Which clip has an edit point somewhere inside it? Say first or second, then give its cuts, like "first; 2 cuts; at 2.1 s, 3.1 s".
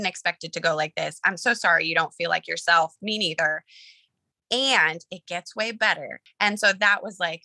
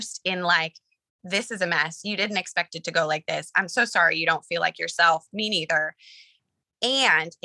first; 1 cut; at 6.2 s